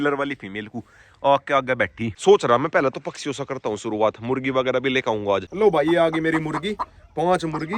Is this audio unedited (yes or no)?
no